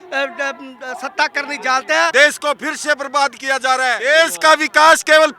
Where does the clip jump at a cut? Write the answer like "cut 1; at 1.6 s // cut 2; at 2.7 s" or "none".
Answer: cut 1; at 2.1 s // cut 2; at 4.0 s